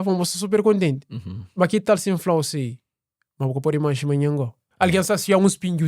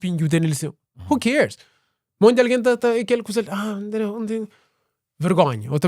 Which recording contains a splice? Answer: first; 1 cut; at 4.6 s

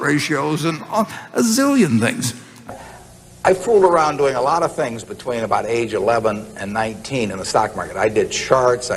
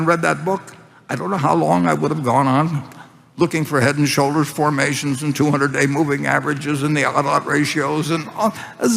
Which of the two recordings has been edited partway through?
first; 1 cut; at 2.7 s

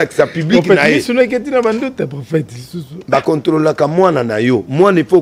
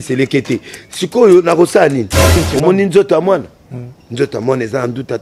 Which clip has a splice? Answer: second; 1 cut; at 2.4 s

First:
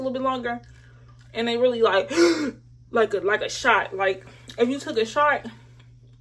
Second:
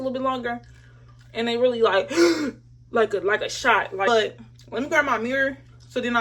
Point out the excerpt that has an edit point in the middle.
second; 1 cut; at 4.1 s

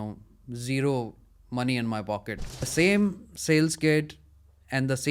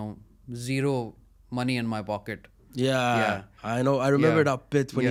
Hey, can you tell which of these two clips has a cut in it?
first; 1 cut; at 2.7 s

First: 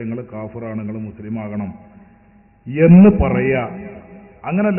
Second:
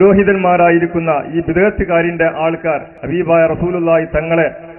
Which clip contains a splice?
second; 1 cut; at 2.9 s

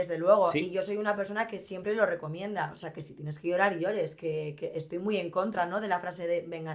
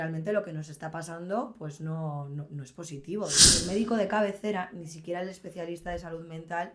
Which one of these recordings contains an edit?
second; 1 cut; at 3.6 s

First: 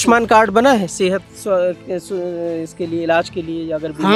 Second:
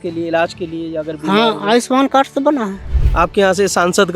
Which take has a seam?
second; 1 cut; at 2.8 s

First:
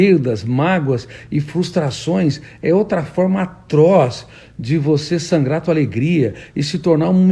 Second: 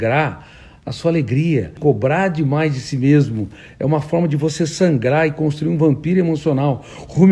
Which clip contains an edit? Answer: second; 1 cut; at 1.8 s

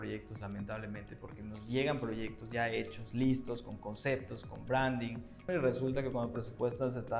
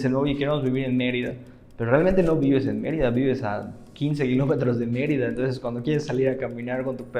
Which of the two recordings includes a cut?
first; 1 cut; at 5.5 s

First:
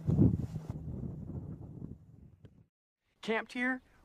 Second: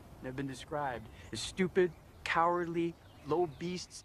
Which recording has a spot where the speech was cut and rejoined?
second; 1 cut; at 1.1 s

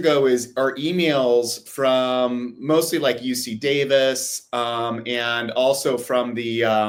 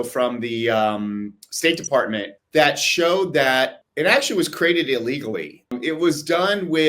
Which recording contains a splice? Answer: second; 3 cuts; at 2.3 s, 3.8 s, 5.7 s

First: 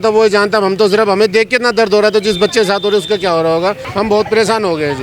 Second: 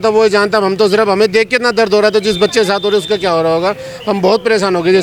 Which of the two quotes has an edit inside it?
first; 1 cut; at 3.8 s

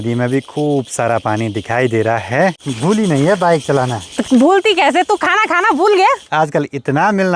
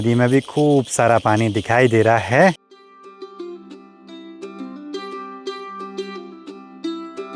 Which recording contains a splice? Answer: first; 2 cuts; at 2.7 s, 6.2 s

